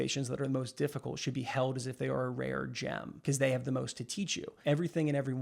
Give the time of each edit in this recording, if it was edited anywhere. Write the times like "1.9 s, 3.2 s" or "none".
3.1 s, 4.6 s